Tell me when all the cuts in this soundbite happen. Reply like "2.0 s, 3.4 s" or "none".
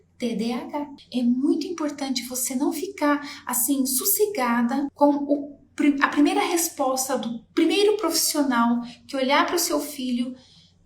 1.0 s, 4.9 s